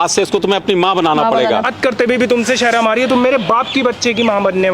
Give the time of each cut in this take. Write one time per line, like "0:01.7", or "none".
0:01.7